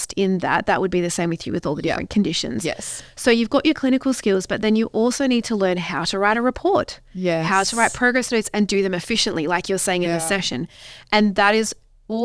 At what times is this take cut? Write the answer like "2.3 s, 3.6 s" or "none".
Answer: none